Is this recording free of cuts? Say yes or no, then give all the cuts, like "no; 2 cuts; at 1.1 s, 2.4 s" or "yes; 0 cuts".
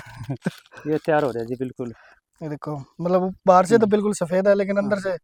yes; 0 cuts